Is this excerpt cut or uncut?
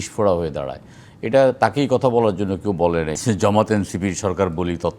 cut